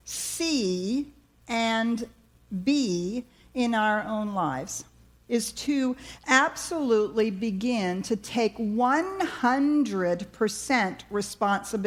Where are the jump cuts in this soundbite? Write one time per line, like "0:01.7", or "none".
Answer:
none